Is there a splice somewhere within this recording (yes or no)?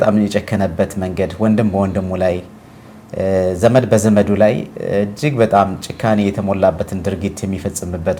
no